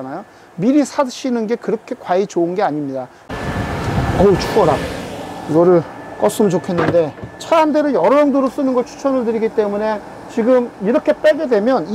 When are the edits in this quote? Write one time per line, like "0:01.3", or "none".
0:03.2